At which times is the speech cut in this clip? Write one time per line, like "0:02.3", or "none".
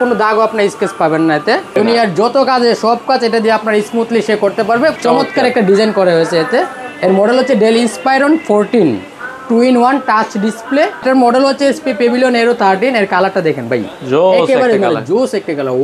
0:01.8
0:05.0
0:11.0